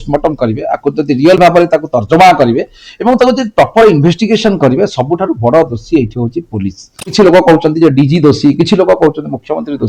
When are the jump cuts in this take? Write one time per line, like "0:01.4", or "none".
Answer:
0:07.1